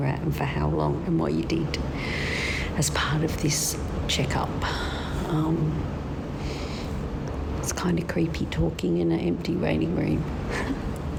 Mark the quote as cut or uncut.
uncut